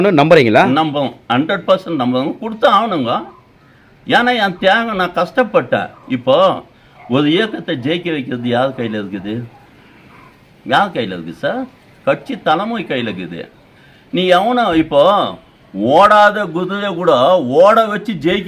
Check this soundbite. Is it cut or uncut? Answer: uncut